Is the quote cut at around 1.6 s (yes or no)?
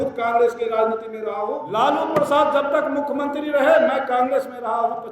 yes